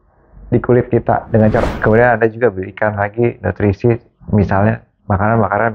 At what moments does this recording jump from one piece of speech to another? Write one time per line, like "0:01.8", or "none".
0:01.6